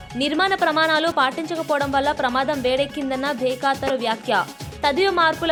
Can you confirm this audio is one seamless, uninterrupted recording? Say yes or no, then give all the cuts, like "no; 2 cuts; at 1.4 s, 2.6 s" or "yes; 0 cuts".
yes; 0 cuts